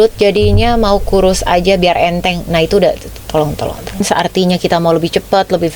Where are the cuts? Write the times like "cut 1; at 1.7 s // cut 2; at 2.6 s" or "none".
cut 1; at 4.0 s